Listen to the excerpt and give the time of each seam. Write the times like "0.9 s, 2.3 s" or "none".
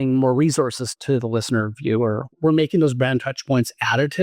1.0 s, 2.3 s